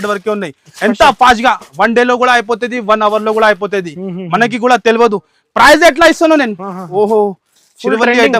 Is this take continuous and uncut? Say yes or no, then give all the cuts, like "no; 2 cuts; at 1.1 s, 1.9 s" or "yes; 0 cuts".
yes; 0 cuts